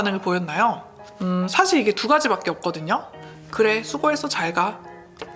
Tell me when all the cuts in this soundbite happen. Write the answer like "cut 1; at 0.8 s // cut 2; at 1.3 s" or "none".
cut 1; at 1.2 s